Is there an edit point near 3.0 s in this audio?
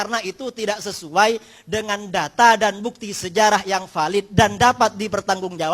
no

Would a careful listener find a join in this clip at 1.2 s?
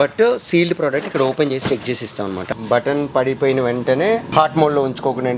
no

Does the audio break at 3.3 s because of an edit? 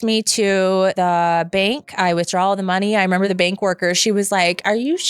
yes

